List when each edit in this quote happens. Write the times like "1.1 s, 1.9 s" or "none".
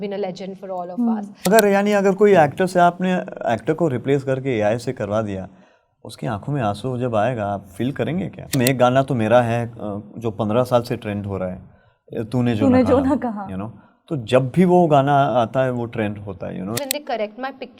1.5 s, 8.6 s, 16.7 s